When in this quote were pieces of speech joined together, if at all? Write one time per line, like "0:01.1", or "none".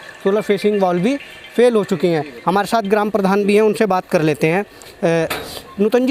none